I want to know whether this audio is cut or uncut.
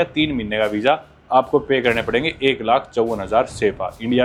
uncut